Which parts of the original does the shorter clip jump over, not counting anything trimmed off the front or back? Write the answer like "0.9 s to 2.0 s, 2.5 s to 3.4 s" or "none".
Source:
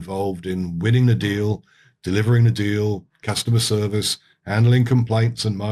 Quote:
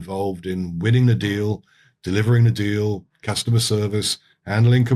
none